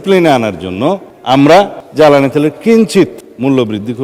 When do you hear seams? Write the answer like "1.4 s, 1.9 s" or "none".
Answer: none